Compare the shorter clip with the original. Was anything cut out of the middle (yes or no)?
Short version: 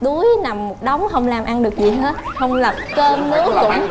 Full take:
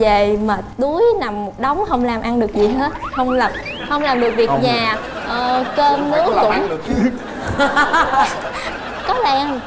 yes